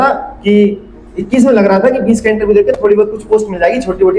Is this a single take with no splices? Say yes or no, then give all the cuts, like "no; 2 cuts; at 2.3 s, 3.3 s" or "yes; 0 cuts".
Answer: yes; 0 cuts